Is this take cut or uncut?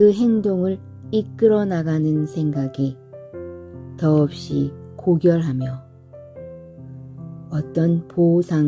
cut